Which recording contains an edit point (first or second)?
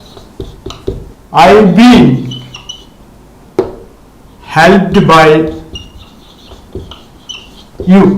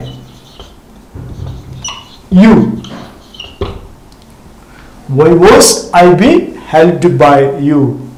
first